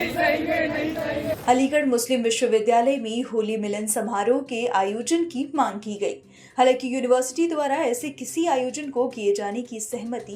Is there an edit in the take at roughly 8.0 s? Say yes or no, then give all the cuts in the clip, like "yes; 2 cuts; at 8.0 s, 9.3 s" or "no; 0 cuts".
no; 1 cut; at 1.2 s